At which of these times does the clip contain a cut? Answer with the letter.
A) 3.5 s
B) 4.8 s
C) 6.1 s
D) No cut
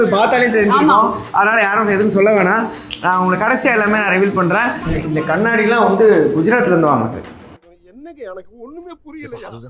B